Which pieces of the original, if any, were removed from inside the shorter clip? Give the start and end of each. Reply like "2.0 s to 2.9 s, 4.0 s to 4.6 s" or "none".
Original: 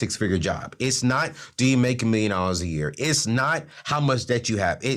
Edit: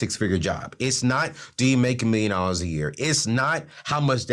none